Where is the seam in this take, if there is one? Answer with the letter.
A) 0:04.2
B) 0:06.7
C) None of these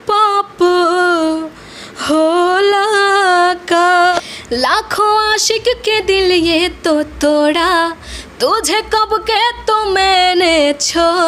A